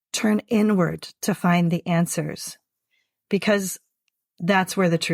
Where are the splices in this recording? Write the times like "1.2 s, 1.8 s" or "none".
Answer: none